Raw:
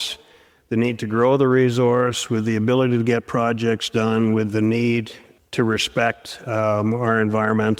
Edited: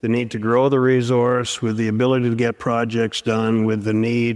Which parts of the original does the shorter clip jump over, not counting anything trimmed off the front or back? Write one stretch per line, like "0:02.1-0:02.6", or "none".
none

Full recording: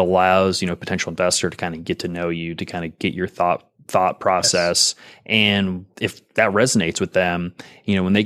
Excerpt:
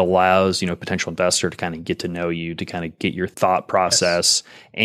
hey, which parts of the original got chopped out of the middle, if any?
0:03.3-0:03.8

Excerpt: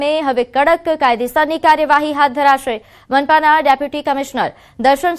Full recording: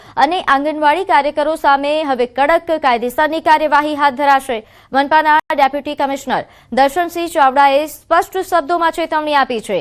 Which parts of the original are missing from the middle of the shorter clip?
0:05.4-0:05.5

